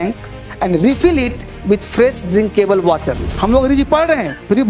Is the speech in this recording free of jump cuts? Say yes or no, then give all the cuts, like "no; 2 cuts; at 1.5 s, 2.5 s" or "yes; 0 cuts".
no; 1 cut; at 3.3 s